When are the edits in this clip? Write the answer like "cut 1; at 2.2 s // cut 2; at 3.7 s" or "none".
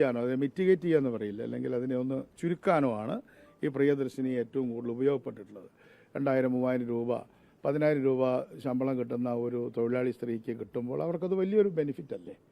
none